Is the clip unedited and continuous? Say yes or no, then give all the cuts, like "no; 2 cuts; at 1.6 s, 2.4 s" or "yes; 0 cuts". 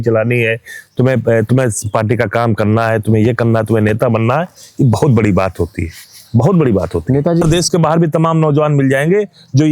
no; 1 cut; at 7.4 s